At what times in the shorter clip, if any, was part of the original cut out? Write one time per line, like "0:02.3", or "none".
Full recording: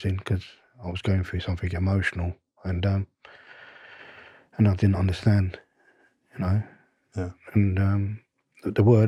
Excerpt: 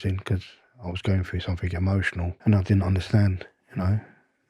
0:02.3
0:03.5